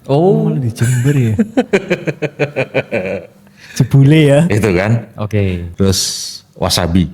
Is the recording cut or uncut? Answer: uncut